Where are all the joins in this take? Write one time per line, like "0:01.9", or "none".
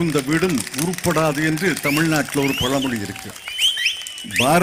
none